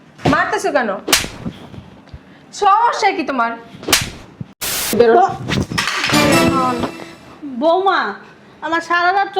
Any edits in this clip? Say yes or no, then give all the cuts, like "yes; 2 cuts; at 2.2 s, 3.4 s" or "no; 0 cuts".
yes; 1 cut; at 4.9 s